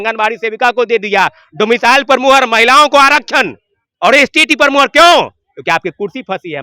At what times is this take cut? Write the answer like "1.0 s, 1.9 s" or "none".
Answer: none